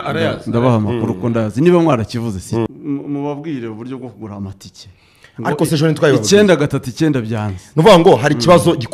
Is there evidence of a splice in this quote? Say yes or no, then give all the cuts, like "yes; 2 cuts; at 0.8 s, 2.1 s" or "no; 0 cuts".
yes; 1 cut; at 2.7 s